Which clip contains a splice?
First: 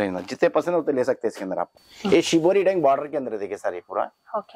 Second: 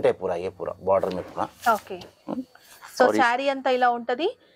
first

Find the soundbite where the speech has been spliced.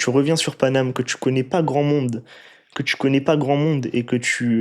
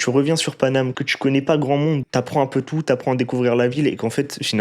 second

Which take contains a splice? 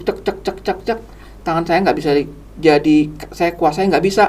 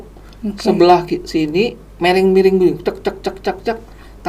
second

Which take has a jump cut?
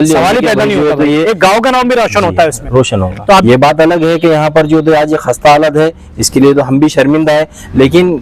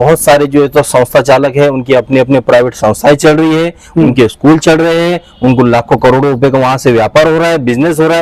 first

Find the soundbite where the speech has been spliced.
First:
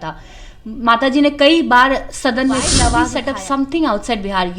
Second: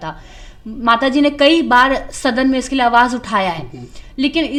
first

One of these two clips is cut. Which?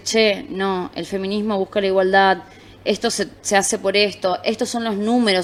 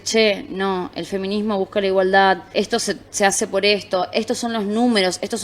second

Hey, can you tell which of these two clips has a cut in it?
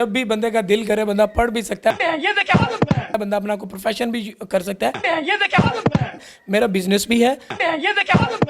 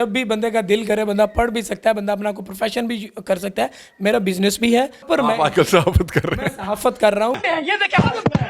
second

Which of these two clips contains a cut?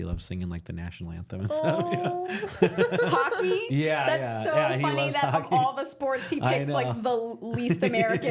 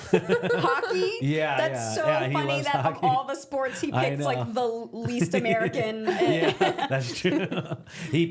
second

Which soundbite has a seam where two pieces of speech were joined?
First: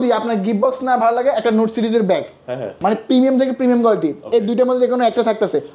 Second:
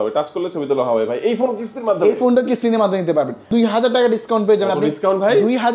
second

